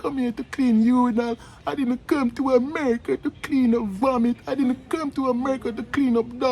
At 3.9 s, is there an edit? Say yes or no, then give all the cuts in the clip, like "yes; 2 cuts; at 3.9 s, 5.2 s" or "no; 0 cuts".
yes; 1 cut; at 3.9 s